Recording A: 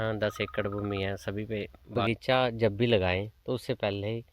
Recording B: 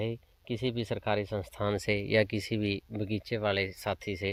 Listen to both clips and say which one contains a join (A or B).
A